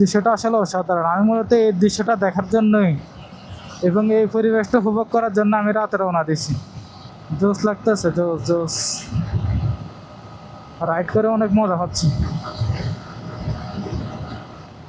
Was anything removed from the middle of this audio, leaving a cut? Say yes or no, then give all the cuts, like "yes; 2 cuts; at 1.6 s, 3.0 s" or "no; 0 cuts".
no; 0 cuts